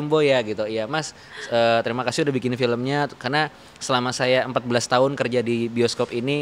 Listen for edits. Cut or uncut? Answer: uncut